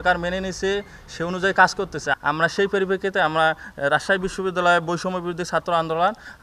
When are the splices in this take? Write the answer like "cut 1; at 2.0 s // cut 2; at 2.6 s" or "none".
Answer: cut 1; at 2.1 s

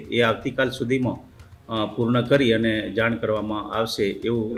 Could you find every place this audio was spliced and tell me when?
none

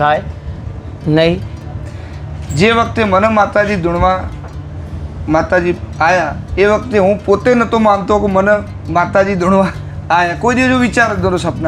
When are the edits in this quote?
cut 1; at 1.6 s

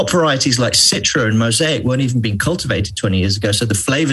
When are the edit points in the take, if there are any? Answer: none

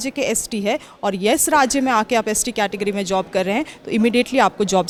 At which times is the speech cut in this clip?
none

